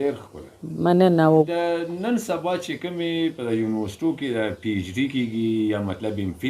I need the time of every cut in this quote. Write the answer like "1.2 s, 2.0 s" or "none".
1.5 s